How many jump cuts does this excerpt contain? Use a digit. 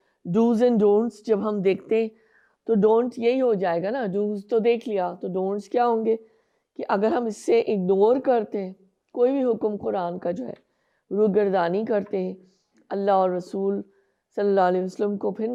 0